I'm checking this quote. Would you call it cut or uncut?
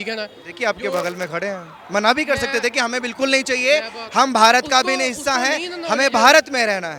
uncut